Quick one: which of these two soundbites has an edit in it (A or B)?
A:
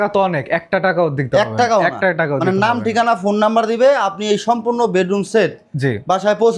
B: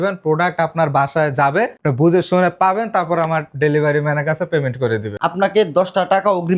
B